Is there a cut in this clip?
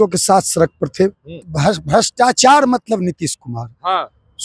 yes; 1 cut; at 1.4 s

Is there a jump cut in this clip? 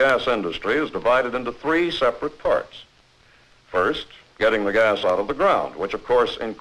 no; 0 cuts

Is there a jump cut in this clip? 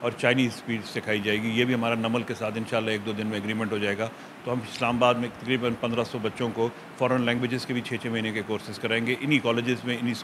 no; 0 cuts

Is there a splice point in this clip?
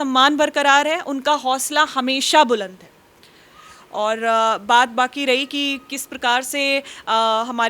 no; 0 cuts

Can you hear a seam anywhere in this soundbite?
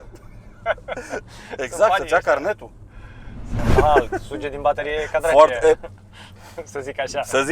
yes; 1 cut; at 3.7 s

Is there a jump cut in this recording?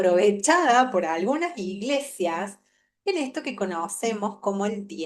no; 0 cuts

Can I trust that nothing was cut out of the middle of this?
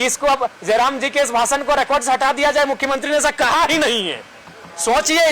yes; 0 cuts

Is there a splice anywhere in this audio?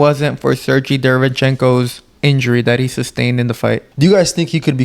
yes; 1 cut; at 3.9 s

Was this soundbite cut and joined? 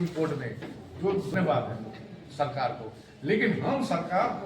yes; 1 cut; at 1.3 s

